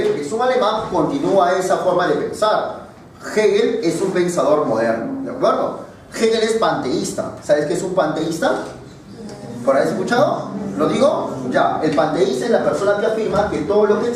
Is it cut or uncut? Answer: cut